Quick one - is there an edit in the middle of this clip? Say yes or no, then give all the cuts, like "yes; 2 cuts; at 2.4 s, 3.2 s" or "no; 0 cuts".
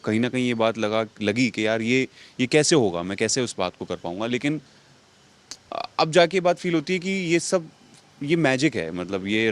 no; 0 cuts